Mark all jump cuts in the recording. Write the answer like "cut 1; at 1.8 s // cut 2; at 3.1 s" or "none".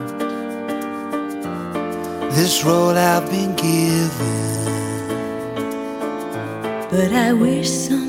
none